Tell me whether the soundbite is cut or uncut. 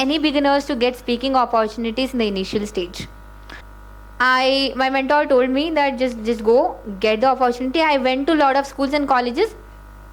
cut